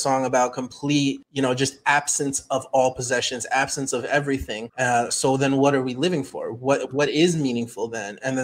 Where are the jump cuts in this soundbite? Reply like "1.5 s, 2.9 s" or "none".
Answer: 1.2 s, 4.6 s